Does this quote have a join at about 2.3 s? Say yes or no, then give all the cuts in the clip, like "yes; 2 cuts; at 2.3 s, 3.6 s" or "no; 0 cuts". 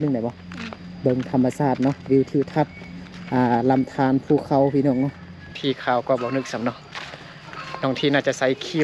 no; 1 cut; at 5.6 s